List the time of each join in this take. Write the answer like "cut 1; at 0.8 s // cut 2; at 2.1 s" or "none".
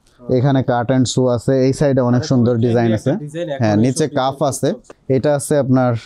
cut 1; at 4.9 s